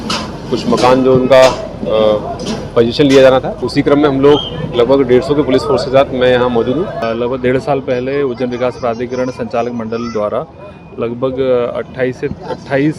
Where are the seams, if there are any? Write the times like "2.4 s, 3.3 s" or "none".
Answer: 3.6 s, 7.0 s

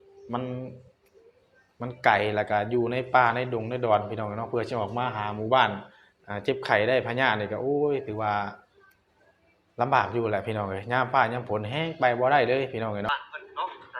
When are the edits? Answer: 13.1 s

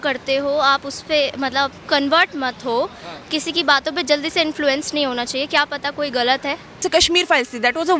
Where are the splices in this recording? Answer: 6.8 s

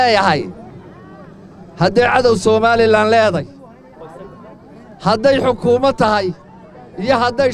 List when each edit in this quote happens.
none

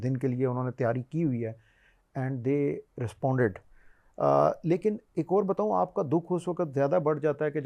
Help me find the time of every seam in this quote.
none

